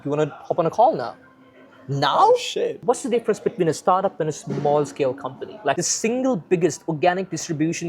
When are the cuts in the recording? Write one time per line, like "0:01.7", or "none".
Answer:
0:02.8
0:05.8